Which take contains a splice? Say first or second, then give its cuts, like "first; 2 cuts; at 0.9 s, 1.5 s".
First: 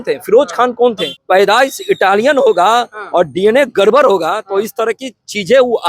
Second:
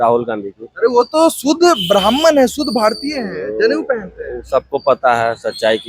first; 1 cut; at 1.2 s